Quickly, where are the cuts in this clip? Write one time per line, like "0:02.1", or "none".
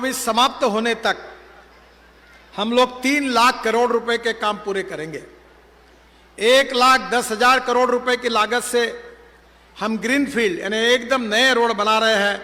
none